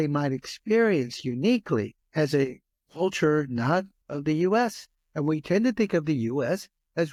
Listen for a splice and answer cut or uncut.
uncut